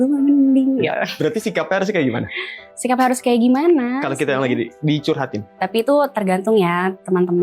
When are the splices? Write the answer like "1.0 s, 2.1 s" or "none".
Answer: none